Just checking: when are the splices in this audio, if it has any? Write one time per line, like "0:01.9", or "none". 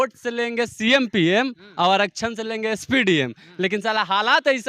none